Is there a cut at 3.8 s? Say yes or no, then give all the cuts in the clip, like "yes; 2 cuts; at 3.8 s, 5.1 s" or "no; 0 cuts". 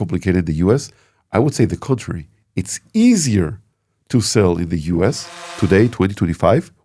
no; 1 cut; at 5.4 s